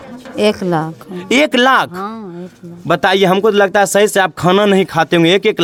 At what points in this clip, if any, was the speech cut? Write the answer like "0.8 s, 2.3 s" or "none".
none